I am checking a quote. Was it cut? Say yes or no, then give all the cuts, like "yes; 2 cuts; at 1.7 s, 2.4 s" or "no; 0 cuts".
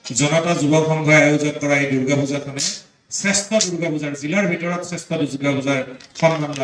no; 0 cuts